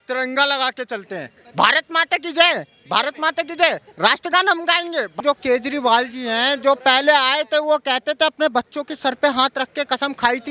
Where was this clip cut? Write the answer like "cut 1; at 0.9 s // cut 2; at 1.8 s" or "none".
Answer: cut 1; at 5.2 s